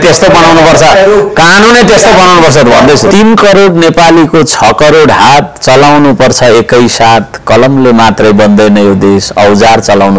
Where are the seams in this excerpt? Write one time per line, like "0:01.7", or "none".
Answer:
0:03.1

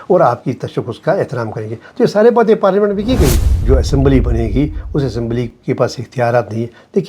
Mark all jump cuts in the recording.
0:03.5

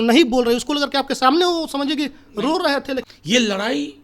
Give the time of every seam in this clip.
0:03.1

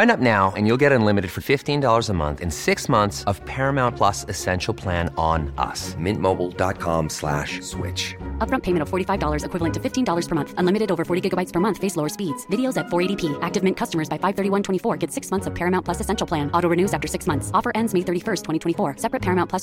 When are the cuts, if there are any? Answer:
none

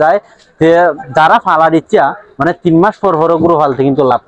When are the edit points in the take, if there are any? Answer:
none

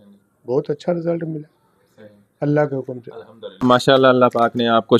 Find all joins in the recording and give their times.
0:03.6

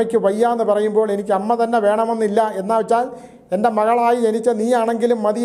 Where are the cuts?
none

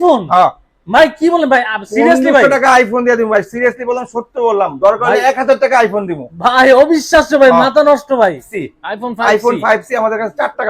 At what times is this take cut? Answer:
0:08.5

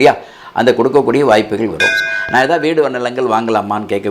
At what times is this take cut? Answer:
0:02.0

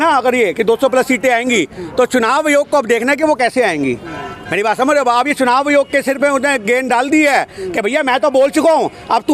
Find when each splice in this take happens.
none

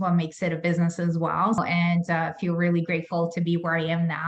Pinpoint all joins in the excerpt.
0:01.6

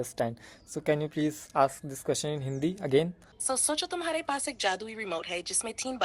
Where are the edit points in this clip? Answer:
0:03.3

